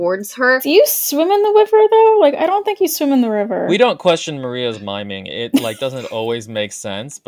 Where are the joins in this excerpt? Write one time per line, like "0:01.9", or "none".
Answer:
0:03.6